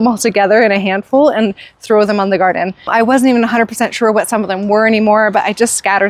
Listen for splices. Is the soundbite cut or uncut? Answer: cut